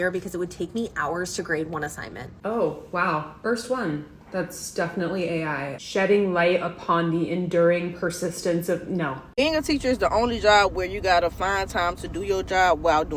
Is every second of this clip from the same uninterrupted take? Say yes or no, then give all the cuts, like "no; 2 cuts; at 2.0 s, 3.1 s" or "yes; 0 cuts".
no; 2 cuts; at 2.3 s, 9.2 s